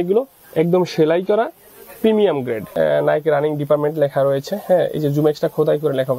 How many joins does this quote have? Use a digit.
1